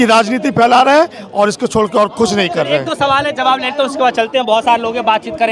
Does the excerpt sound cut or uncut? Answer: uncut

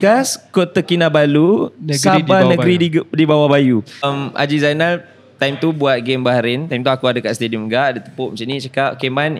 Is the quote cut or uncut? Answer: cut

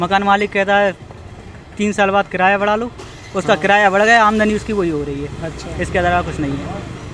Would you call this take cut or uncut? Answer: uncut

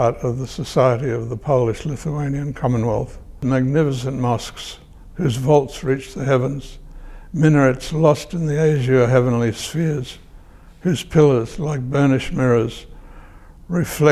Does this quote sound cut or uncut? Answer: cut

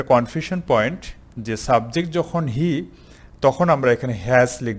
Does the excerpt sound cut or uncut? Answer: uncut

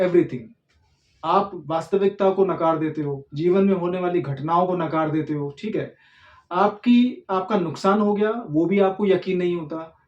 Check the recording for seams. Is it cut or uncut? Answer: uncut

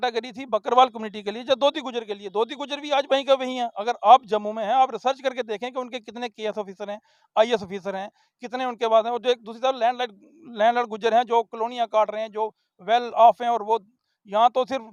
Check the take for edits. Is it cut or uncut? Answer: uncut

